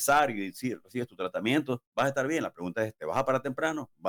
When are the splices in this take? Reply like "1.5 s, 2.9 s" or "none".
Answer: none